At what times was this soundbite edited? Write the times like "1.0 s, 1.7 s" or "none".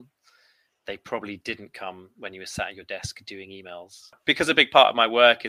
4.2 s